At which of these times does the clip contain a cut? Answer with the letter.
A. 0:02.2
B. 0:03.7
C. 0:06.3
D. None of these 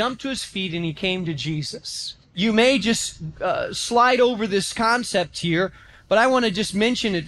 A